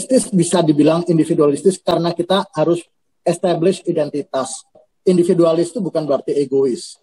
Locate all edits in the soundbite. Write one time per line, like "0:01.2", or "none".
0:04.9